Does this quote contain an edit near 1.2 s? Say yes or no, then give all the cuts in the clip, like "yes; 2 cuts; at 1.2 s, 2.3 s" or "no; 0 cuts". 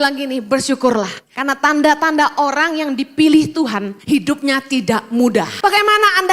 yes; 3 cuts; at 1.2 s, 3.9 s, 5.5 s